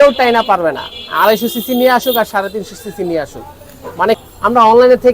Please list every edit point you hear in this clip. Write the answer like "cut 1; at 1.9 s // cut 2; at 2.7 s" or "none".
cut 1; at 4.2 s